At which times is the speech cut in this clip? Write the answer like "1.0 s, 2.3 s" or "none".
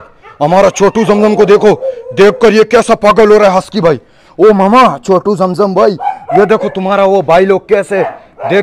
none